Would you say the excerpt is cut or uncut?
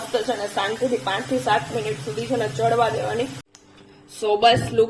cut